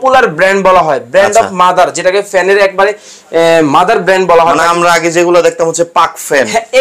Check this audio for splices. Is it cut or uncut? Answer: uncut